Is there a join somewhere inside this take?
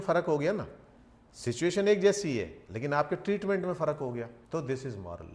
yes; 1 cut; at 4.4 s

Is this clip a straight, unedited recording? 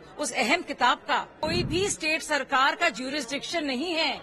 no; 1 cut; at 1.3 s

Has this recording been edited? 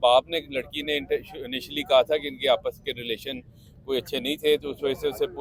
no; 0 cuts

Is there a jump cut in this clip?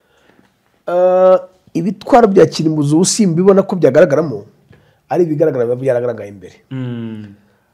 no; 0 cuts

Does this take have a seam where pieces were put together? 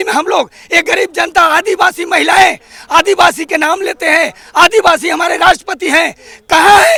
no; 0 cuts

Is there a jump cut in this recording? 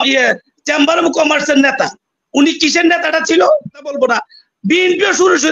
yes; 1 cut; at 4.0 s

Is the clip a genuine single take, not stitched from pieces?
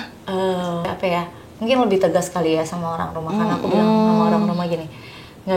no; 1 cut; at 0.9 s

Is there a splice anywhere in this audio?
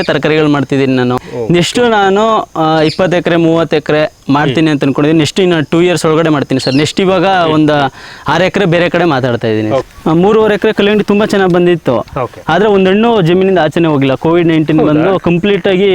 yes; 2 cuts; at 1.3 s, 9.8 s

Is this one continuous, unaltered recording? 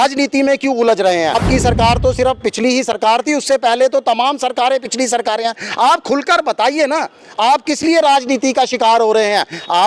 no; 1 cut; at 1.4 s

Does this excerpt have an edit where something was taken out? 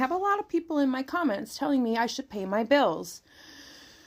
no; 0 cuts

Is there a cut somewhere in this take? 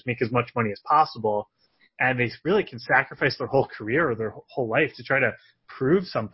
no; 0 cuts

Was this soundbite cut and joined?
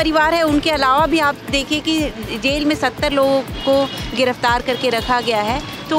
no; 0 cuts

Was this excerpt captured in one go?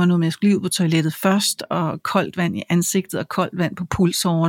yes; 0 cuts

